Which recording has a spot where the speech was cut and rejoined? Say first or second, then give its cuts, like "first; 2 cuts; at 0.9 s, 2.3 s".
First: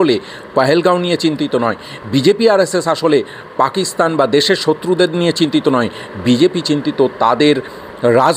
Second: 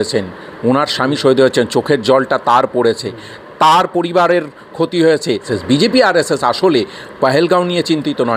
second; 1 cut; at 5.5 s